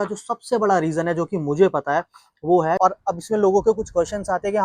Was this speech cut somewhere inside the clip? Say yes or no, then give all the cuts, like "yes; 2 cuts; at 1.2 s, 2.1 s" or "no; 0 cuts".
yes; 1 cut; at 2.8 s